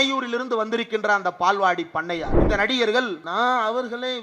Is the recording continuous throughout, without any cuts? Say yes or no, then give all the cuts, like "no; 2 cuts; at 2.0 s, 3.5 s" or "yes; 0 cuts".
no; 2 cuts; at 2.4 s, 3.2 s